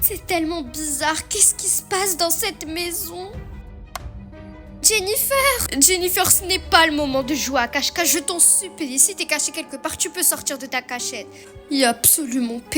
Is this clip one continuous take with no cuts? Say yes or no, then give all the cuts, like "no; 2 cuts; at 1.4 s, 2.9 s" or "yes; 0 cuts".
yes; 0 cuts